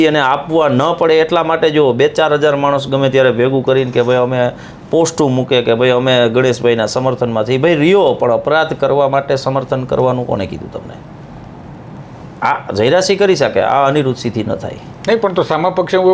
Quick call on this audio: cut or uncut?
uncut